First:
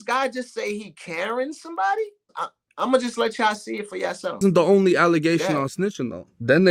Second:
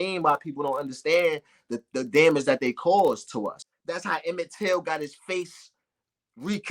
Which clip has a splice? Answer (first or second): second